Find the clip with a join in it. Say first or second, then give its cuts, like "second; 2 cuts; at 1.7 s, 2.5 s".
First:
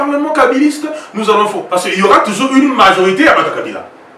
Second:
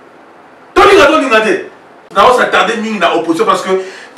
second; 1 cut; at 2.1 s